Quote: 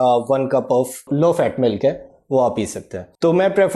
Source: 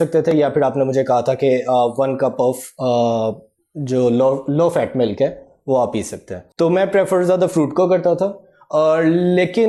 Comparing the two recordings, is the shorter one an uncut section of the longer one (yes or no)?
no